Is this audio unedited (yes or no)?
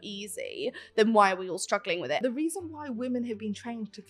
no